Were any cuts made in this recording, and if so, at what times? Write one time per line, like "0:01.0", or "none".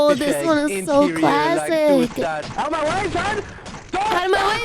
0:02.4